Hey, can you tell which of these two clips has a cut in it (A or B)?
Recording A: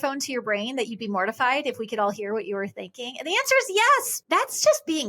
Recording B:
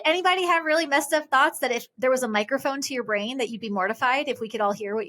A